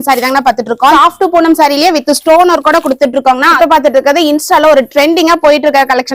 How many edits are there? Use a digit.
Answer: 2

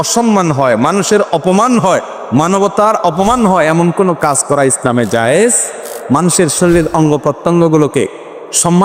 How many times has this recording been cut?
0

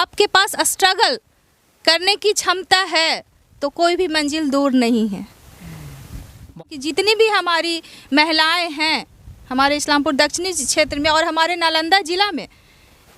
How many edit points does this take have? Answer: 1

